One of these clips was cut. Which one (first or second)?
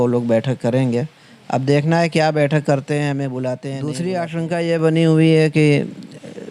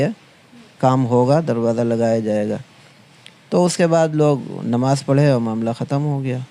first